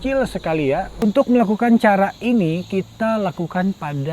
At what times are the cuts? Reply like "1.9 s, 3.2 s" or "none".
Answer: 0.9 s